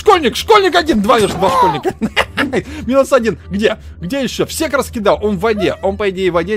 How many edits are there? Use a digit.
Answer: 0